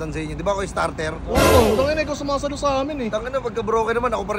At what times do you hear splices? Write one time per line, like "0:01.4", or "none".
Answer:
none